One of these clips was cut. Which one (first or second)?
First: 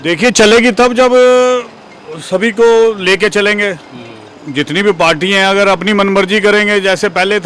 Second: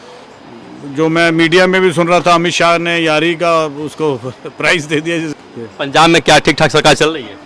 second